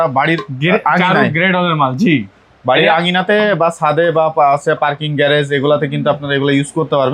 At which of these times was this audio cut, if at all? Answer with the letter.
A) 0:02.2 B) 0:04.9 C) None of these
C